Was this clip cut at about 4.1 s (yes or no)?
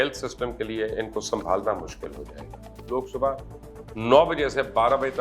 no